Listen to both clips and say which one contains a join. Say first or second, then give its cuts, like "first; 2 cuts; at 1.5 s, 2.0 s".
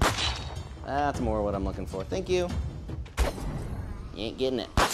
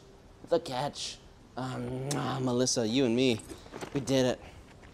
first; 1 cut; at 3.1 s